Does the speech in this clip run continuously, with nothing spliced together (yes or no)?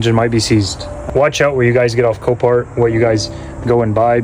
no